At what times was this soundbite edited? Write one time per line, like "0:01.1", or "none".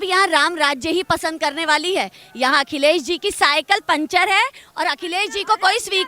none

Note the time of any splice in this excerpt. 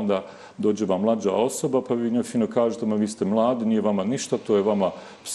none

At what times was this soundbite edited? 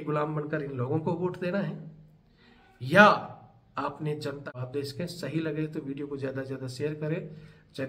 0:04.5

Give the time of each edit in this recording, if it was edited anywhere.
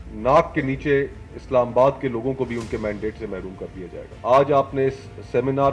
0:04.1

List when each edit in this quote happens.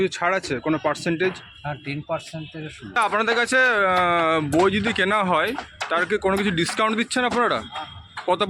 0:02.9

